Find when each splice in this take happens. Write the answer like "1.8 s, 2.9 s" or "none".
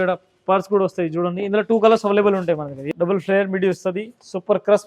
2.7 s